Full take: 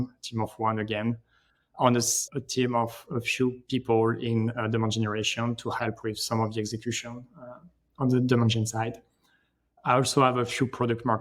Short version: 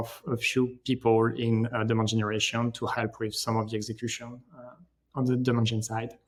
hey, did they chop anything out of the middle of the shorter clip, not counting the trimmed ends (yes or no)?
no